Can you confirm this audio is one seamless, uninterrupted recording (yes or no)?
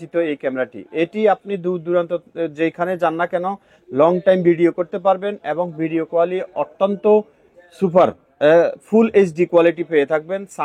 yes